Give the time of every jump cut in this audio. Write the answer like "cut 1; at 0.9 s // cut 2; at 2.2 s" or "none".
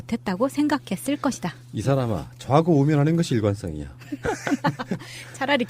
cut 1; at 4.3 s

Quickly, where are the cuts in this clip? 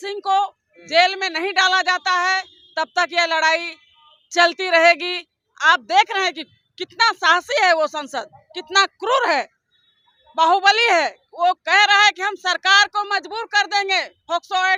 none

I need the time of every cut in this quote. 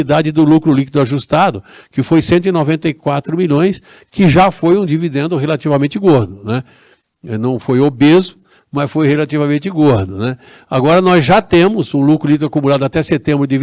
none

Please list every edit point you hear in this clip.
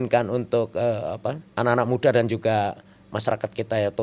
cut 1; at 1.4 s

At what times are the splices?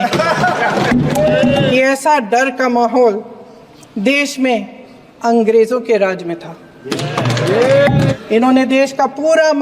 cut 1; at 1.6 s // cut 2; at 8.1 s

